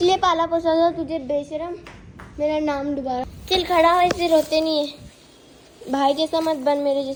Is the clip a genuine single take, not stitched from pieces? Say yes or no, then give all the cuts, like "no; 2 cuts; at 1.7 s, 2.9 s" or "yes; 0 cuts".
yes; 0 cuts